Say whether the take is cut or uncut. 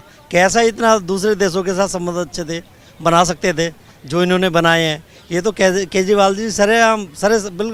uncut